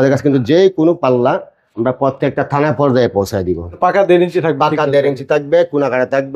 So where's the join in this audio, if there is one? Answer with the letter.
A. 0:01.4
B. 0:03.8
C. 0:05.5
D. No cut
B